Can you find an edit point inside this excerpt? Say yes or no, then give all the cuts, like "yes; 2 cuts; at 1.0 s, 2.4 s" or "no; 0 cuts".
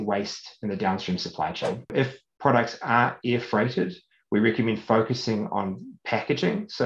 yes; 1 cut; at 1.9 s